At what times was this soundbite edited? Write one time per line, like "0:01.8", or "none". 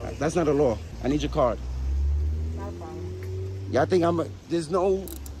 0:00.9